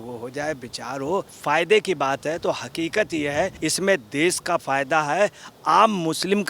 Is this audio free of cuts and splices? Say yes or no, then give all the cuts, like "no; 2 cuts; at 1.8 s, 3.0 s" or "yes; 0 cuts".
no; 2 cuts; at 1.4 s, 3.5 s